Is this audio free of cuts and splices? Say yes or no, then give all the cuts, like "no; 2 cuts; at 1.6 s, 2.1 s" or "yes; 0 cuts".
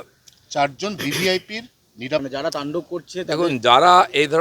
no; 1 cut; at 2.2 s